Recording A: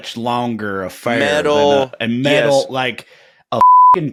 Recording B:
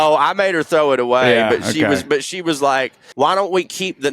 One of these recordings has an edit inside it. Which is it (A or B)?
B